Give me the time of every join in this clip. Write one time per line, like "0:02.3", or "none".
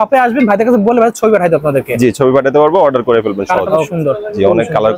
0:03.9

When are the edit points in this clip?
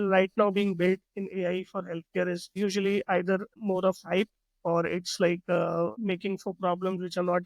0:02.5
0:03.5
0:06.0

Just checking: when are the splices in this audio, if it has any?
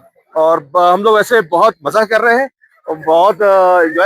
none

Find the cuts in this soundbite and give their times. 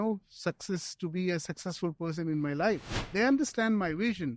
0:03.0

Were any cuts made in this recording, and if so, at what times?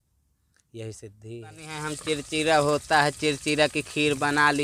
0:01.7

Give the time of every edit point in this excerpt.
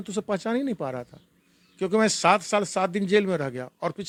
none

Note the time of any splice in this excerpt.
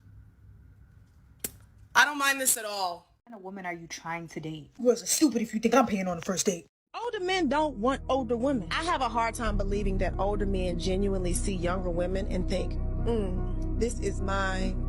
0:03.5
0:06.7

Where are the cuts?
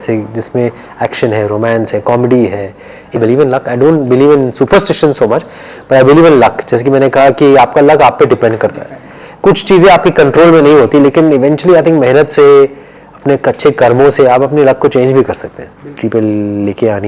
0:03.2
0:16.0

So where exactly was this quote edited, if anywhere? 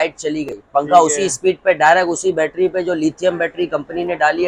none

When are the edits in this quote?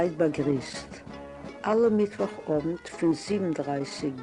0:02.3

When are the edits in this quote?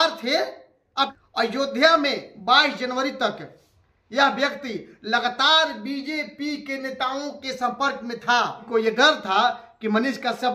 0:01.1
0:08.6

